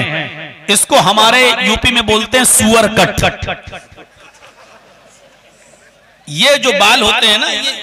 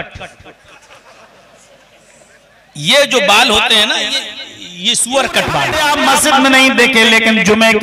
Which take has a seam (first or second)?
second